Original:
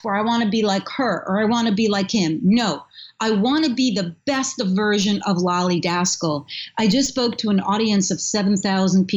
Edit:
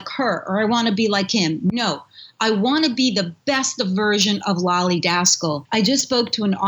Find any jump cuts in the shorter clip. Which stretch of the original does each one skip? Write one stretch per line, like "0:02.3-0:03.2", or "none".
0:06.4-0:06.7